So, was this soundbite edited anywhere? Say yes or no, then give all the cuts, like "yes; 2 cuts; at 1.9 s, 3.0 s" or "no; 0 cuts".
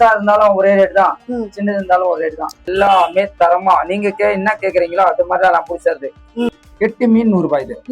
yes; 2 cuts; at 2.7 s, 6.6 s